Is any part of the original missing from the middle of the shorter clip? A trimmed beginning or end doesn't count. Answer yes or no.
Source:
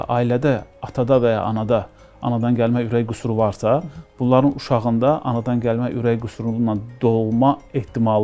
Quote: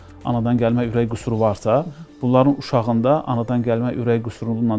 no